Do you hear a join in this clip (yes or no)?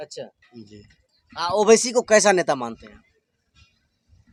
no